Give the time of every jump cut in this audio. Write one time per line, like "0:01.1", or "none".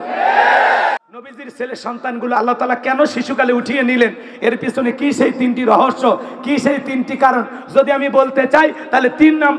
0:01.0